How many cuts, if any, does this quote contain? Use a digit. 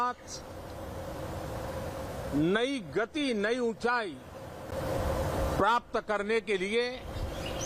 0